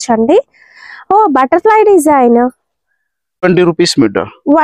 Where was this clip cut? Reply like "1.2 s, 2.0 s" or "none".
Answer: 3.4 s